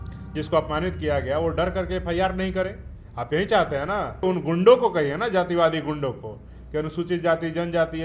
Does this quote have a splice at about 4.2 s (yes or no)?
yes